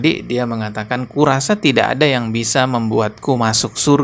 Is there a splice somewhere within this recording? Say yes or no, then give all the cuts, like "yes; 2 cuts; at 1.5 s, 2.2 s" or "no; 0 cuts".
no; 0 cuts